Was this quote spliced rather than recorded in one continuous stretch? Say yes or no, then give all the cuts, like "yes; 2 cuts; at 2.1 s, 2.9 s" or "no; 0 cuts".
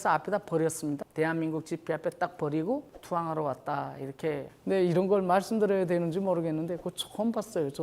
yes; 2 cuts; at 1.0 s, 4.5 s